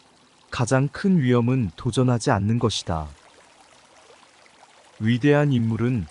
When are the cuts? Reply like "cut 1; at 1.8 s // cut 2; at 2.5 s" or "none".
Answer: cut 1; at 3.1 s // cut 2; at 4.6 s